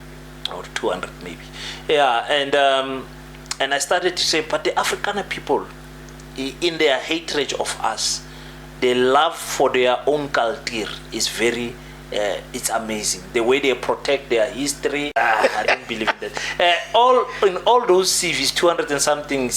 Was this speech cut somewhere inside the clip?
yes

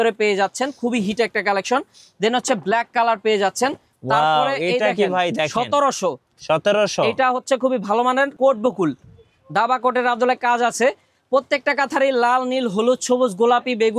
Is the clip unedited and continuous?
no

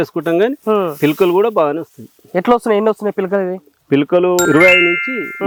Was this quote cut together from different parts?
no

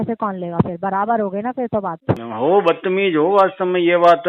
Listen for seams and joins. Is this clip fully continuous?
no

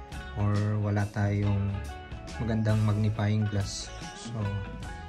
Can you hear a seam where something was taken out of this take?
yes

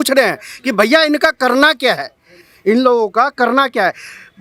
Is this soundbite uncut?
yes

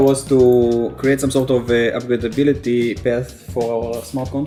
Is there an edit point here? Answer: no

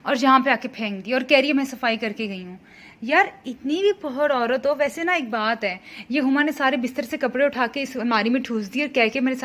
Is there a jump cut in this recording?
no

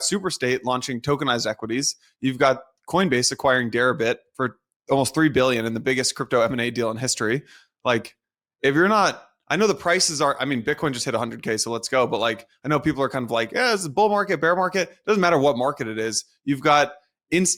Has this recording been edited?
no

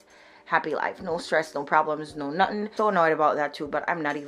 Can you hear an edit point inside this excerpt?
yes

